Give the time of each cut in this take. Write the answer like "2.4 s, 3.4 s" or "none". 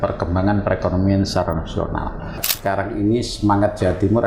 2.5 s